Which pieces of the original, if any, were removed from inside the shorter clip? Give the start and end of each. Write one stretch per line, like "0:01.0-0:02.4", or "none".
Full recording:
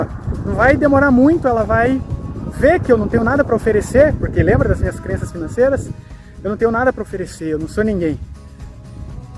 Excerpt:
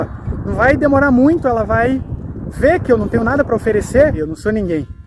0:04.2-0:07.5